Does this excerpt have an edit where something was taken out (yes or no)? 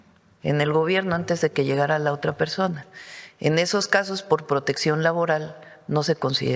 no